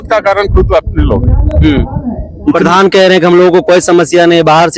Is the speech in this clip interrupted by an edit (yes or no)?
no